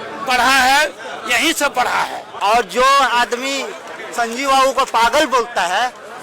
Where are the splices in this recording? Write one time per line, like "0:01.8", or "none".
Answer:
0:02.3